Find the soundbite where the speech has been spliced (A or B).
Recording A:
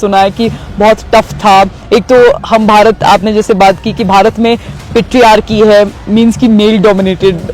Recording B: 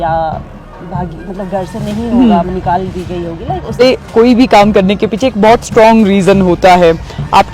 B